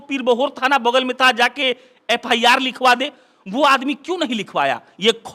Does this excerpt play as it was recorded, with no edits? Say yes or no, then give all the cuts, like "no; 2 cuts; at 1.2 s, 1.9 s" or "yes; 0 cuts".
yes; 0 cuts